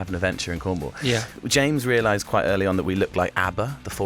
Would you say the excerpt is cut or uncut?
cut